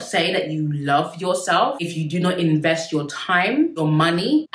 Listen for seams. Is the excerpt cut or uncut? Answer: uncut